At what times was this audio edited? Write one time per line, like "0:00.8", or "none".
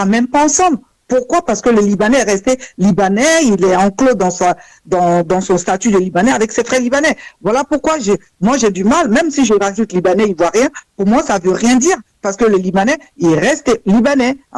none